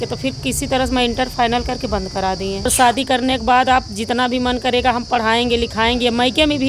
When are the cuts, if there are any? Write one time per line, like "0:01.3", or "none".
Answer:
0:02.7